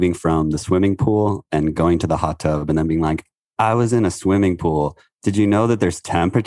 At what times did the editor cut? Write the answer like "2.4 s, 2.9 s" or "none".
none